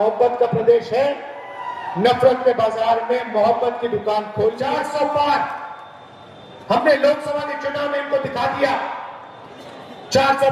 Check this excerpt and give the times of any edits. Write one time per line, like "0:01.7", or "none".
0:04.6